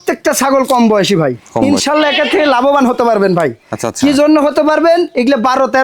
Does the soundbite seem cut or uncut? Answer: cut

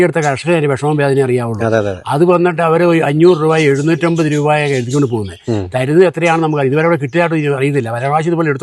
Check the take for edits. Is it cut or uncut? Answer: uncut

